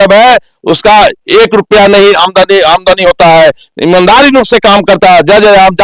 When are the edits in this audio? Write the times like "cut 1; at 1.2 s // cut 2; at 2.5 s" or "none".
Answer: none